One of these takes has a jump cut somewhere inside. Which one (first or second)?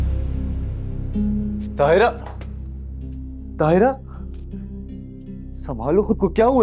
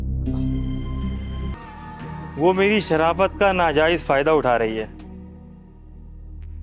second